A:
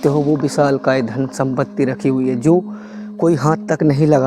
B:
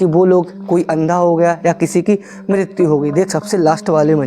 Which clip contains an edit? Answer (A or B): B